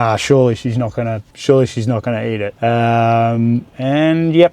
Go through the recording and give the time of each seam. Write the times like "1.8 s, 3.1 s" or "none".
1.2 s, 2.5 s